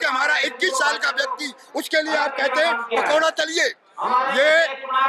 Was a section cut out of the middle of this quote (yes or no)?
no